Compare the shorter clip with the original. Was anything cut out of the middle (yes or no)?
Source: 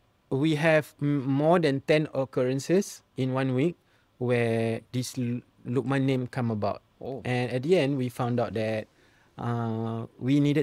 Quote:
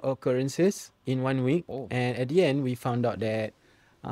yes